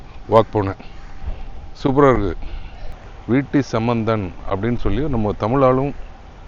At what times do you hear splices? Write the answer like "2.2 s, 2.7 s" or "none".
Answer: 3.0 s